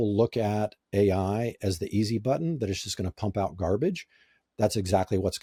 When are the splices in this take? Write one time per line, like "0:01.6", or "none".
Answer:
none